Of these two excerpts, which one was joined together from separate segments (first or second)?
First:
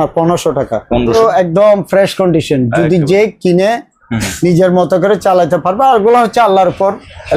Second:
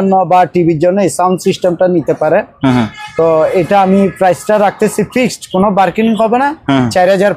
first